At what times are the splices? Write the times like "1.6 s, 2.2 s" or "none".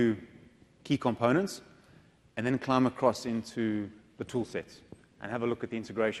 none